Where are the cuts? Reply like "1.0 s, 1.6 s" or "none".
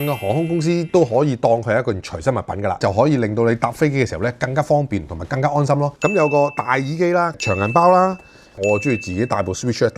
2.8 s, 5.9 s, 8.6 s